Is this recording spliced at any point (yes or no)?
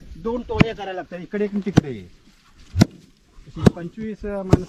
no